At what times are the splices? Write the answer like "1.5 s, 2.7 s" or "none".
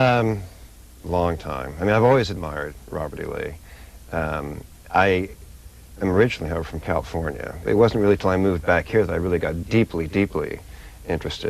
2.9 s